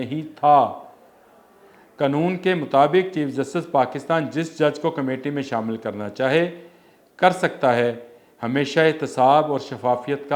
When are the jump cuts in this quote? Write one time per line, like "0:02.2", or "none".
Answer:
none